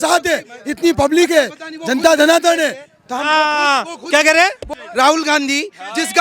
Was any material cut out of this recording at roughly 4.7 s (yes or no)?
yes